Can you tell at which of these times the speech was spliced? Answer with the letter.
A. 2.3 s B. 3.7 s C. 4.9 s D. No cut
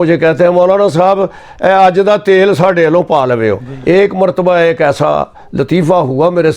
B